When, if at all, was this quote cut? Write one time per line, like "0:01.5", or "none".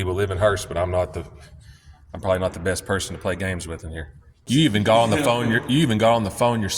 0:04.3